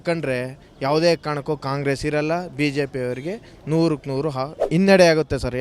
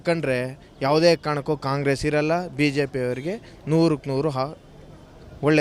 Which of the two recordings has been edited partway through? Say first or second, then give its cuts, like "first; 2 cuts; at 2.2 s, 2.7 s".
first; 1 cut; at 4.6 s